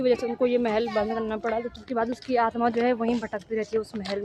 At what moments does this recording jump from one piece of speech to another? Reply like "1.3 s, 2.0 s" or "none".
1.7 s